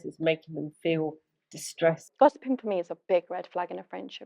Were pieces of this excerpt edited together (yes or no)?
yes